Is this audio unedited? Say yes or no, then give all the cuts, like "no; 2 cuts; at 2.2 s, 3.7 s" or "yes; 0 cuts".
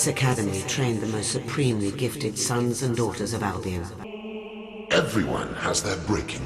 no; 1 cut; at 4.0 s